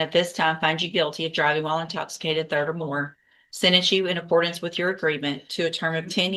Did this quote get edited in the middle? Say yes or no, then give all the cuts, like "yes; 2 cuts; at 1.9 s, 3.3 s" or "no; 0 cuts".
no; 0 cuts